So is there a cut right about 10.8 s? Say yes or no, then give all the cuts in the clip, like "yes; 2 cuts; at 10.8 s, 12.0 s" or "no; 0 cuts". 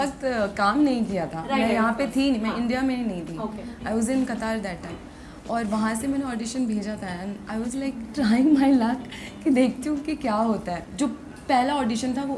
yes; 1 cut; at 10.8 s